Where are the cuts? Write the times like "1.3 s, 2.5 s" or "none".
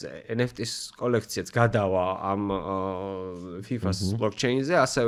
none